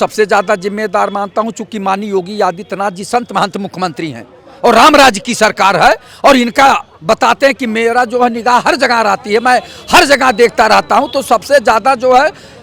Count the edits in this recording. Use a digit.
0